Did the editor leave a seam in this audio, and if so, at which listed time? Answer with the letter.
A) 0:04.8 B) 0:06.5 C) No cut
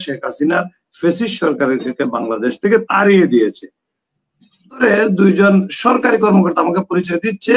A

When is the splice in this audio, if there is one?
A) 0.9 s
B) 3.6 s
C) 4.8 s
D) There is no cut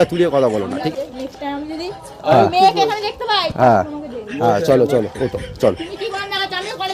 A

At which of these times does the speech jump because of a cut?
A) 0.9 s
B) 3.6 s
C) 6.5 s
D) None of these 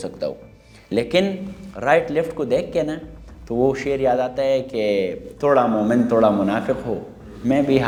D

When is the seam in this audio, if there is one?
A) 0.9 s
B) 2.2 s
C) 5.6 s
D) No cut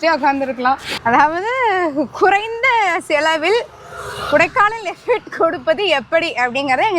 A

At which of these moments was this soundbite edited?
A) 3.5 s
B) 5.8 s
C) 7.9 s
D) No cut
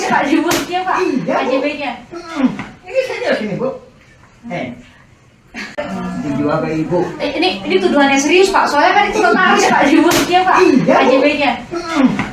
B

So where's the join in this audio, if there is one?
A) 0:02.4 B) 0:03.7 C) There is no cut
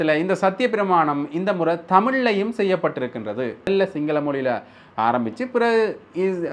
B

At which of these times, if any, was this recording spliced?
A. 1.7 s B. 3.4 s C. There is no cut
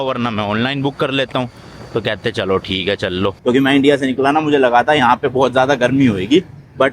B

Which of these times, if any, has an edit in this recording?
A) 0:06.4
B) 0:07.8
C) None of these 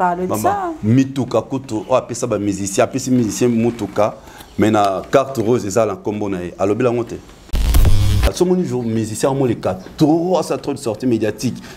B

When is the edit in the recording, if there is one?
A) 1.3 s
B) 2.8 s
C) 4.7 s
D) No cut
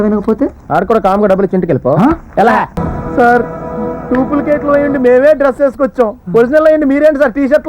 B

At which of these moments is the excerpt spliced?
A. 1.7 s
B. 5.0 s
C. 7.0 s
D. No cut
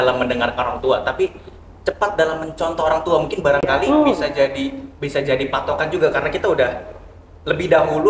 D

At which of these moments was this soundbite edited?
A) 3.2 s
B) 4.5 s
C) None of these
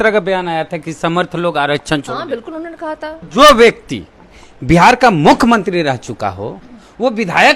A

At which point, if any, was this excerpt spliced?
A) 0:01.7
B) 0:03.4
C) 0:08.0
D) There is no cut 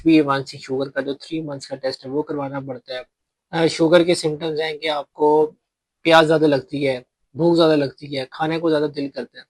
B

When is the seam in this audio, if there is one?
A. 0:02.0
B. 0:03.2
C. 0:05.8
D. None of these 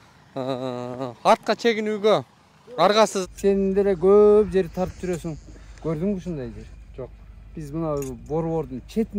B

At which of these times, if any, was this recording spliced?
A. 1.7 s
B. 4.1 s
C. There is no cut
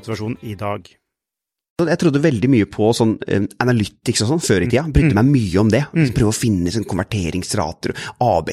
A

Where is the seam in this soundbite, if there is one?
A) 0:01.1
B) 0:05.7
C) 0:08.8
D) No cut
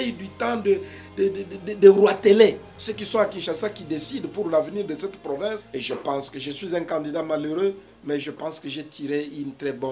B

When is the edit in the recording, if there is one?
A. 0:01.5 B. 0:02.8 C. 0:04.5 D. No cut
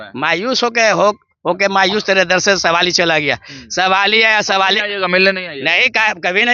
D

